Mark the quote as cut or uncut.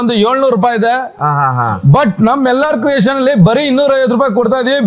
uncut